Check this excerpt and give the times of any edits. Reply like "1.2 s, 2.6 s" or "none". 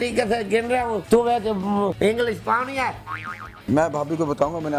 1.0 s, 2.0 s, 3.4 s